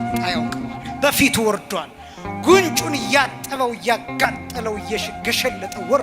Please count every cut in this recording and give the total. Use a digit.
1